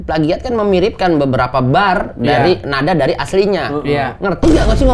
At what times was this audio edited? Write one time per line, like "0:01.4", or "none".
none